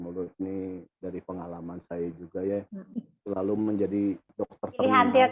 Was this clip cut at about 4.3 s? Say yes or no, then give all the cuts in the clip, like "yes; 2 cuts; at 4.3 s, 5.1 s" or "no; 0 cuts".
yes; 1 cut; at 4.3 s